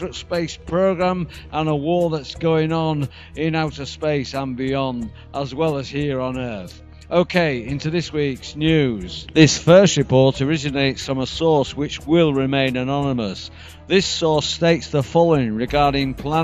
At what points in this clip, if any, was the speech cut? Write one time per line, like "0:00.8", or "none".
0:15.3